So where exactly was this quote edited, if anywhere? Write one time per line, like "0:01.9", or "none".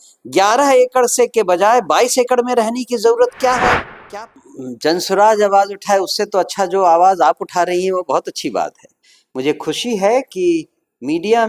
0:04.0

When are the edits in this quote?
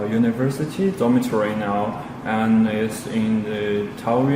0:03.4

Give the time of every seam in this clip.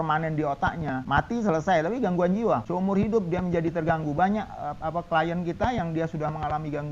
0:01.0
0:02.7

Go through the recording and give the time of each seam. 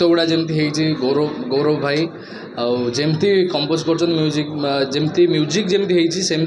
none

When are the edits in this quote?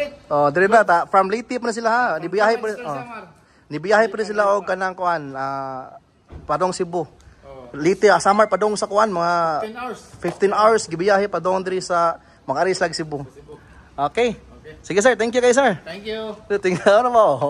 0:01.1

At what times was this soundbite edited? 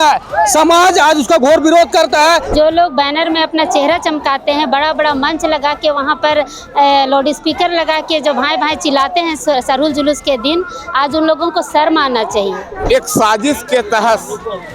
0:02.5
0:12.7

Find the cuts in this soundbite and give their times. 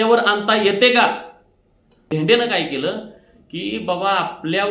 0:01.9

